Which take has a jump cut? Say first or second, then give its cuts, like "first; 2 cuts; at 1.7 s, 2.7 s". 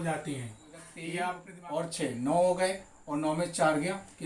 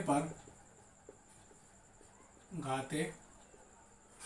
first; 1 cut; at 1.5 s